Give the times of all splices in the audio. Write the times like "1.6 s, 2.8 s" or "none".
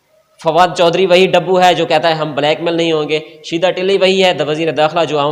none